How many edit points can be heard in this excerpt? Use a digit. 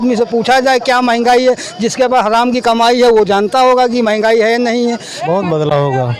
1